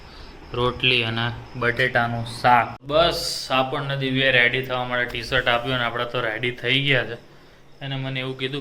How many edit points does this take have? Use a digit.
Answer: 1